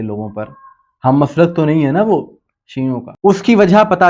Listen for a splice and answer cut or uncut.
cut